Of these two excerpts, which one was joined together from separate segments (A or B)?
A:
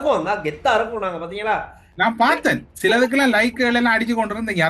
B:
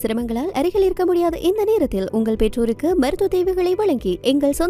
A